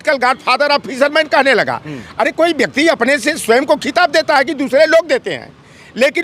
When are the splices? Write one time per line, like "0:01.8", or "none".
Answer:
none